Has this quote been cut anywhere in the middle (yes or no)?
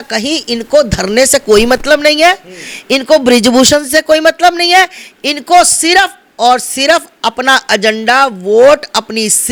no